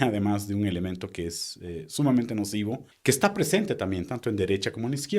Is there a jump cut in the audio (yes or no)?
yes